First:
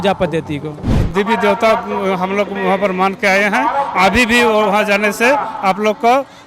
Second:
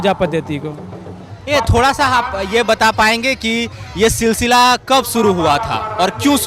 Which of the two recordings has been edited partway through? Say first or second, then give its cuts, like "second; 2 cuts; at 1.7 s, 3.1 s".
first; 1 cut; at 1.0 s